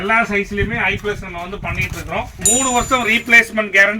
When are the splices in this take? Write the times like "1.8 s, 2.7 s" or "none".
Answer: 2.1 s